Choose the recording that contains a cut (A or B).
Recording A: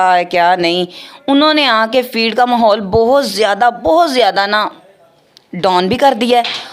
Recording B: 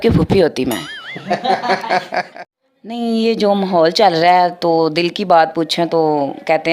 B